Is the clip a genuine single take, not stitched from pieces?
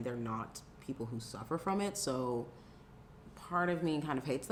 yes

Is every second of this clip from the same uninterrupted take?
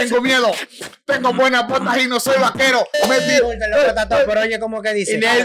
no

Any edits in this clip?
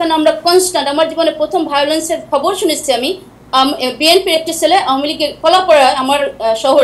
no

